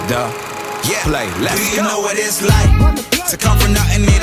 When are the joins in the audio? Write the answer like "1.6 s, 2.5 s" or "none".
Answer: none